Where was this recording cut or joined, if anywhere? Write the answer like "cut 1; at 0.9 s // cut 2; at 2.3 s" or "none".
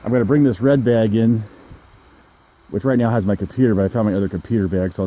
none